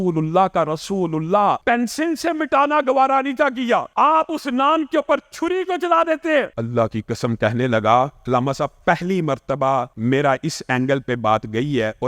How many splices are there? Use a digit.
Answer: 5